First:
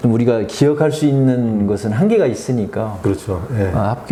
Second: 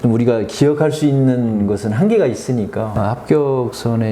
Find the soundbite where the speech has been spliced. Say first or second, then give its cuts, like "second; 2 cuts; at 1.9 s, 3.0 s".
second; 1 cut; at 2.9 s